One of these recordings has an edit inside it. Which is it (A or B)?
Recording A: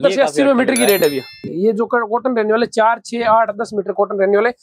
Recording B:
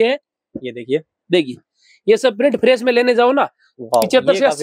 A